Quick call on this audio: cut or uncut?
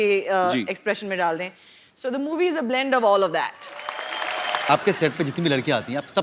cut